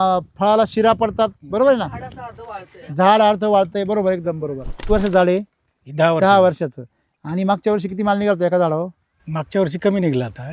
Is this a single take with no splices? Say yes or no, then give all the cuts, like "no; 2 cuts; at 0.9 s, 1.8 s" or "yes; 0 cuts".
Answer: no; 1 cut; at 4.8 s